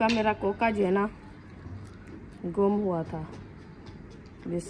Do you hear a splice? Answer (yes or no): no